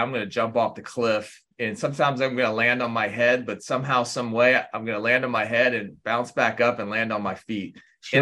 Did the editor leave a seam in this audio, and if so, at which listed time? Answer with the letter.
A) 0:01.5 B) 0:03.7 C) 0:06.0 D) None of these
A